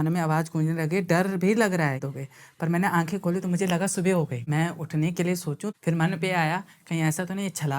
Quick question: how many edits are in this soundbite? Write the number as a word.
three